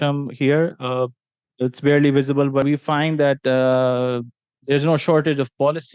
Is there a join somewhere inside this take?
yes; 1 cut; at 2.6 s

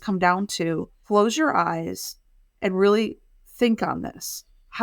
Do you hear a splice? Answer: yes; 1 cut; at 0.9 s

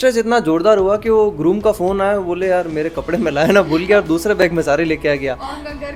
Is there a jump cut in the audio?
no; 0 cuts

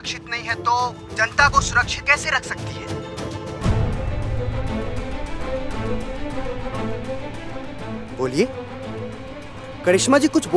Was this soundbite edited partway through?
no; 0 cuts

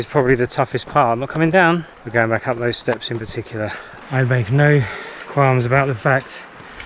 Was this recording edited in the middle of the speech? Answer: yes; 2 cuts; at 2.0 s, 3.9 s

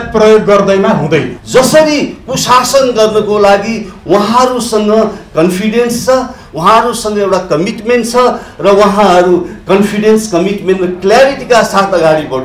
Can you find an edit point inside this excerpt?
yes; 1 cut; at 1.4 s

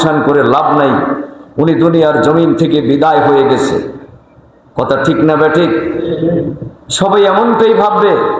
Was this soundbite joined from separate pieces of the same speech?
no; 0 cuts

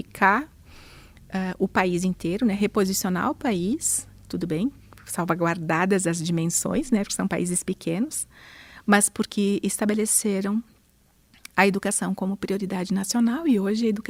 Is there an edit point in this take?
no; 0 cuts

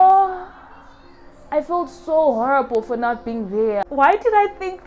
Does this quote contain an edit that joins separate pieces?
yes; 1 cut; at 3.9 s

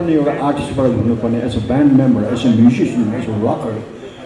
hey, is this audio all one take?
yes; 0 cuts

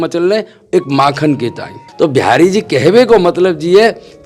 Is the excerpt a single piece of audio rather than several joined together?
no; 1 cut; at 1.8 s

